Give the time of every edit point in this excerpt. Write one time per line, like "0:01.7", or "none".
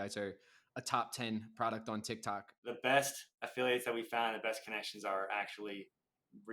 0:02.5